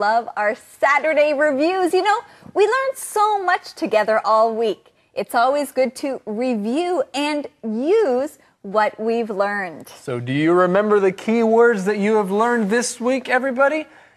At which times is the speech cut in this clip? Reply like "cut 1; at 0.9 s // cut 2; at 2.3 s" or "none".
cut 1; at 7.5 s

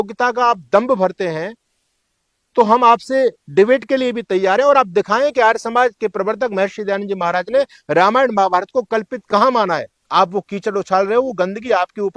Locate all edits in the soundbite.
cut 1; at 10.0 s

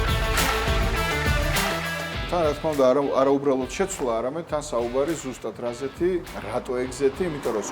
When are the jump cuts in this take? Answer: cut 1; at 2.3 s

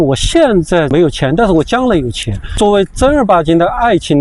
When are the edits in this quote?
cut 1; at 0.9 s // cut 2; at 2.5 s

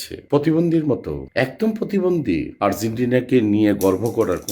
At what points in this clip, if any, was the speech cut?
cut 1; at 2.5 s

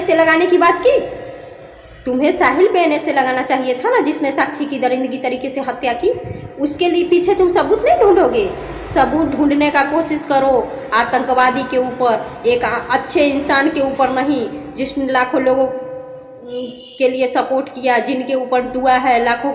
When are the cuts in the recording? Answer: none

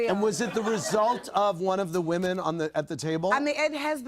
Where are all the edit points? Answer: none

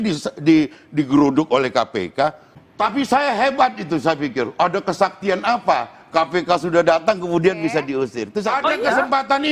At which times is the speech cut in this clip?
cut 1; at 2.5 s // cut 2; at 8.3 s

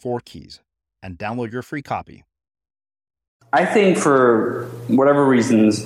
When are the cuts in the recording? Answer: cut 1; at 3.5 s

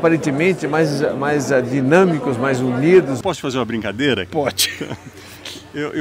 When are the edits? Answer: cut 1; at 3.2 s

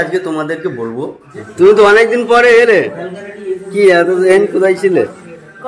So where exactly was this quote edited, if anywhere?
cut 1; at 1.3 s

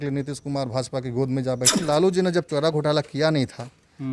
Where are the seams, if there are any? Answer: cut 1; at 1.8 s

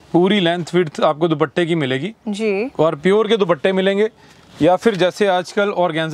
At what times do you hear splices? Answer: none

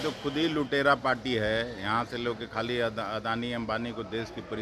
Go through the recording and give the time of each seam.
none

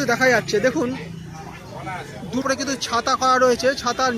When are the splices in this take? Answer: cut 1; at 2.4 s

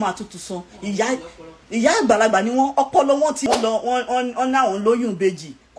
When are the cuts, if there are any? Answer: cut 1; at 3.4 s

